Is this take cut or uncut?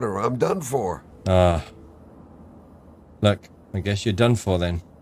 cut